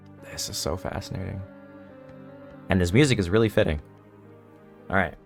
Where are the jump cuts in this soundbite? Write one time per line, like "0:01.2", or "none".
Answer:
none

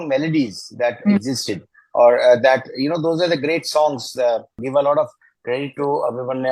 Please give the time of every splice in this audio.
0:04.6

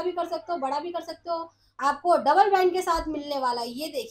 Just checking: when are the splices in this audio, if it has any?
0:01.6

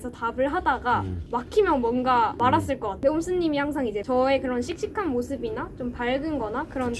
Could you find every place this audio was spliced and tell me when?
0:01.2
0:02.5
0:04.0

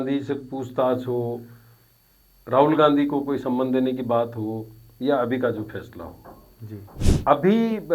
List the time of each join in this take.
0:07.0

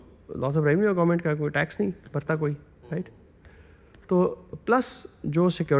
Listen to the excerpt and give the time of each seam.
none

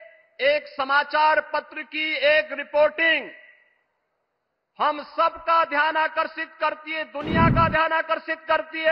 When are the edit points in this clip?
none

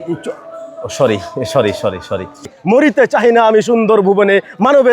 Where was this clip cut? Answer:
0:02.5

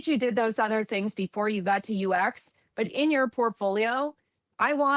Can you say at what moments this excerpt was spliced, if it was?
none

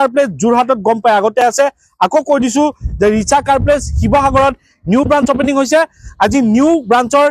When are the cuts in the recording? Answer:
none

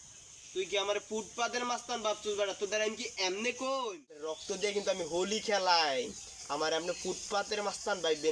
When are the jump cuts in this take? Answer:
0:04.3

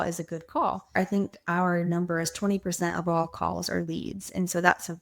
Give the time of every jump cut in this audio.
0:00.9

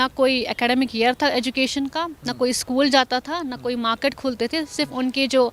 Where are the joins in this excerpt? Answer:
none

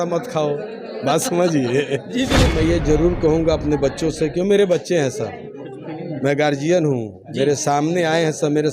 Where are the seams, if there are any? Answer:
0:02.5

